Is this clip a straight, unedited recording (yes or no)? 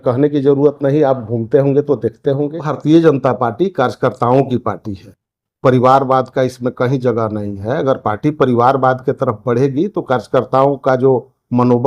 no